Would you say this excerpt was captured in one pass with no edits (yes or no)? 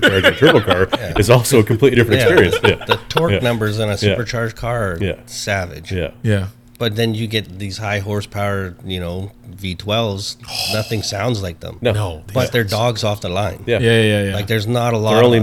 yes